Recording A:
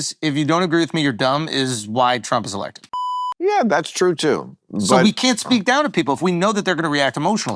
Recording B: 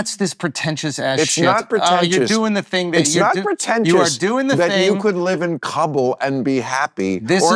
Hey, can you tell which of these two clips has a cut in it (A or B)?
A